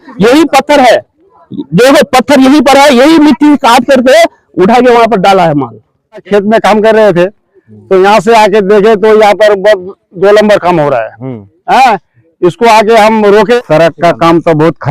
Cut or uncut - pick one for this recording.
cut